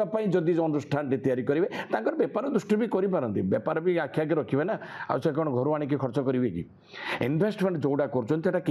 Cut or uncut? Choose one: uncut